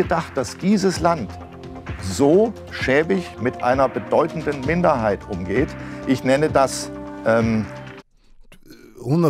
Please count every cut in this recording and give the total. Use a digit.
0